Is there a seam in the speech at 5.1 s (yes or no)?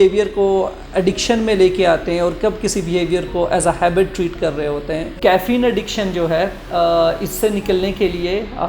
yes